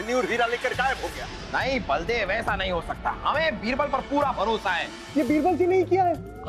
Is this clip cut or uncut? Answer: cut